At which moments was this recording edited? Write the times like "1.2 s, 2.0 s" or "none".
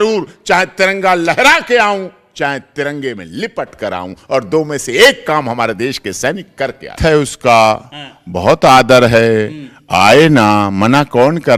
none